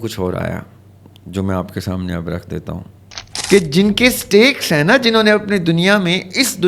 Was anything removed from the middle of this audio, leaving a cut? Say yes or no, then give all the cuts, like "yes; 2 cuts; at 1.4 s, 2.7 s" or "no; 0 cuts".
yes; 1 cut; at 3.3 s